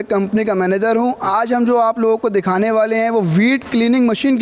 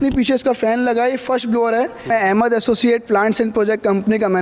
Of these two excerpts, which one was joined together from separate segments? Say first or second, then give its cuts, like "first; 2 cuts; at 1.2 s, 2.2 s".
second; 1 cut; at 2.1 s